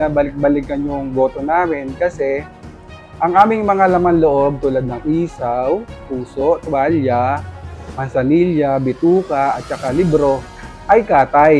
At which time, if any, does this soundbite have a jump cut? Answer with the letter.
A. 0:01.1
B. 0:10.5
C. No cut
C